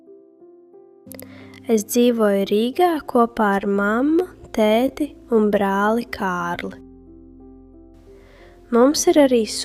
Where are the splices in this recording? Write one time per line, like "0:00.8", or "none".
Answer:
none